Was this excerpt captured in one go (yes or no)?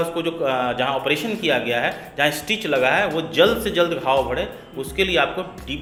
yes